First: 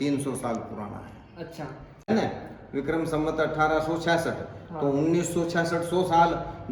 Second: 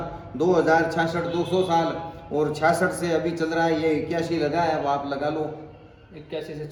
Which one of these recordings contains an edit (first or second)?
first